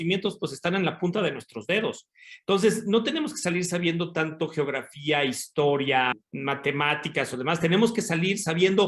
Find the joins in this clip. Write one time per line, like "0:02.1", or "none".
0:06.1